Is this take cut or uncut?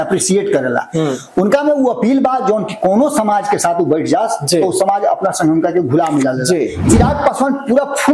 cut